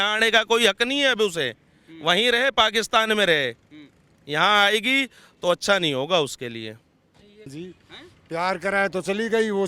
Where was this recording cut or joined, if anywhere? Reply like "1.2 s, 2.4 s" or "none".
7.5 s